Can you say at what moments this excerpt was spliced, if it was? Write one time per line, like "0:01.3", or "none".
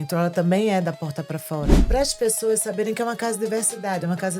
0:01.8